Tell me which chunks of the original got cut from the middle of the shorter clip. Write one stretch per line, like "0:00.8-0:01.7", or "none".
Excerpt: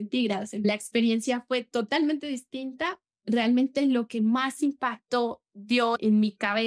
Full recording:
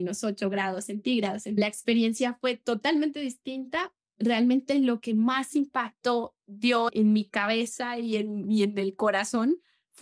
none